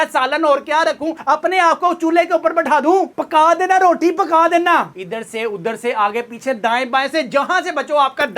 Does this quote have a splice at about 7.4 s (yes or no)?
no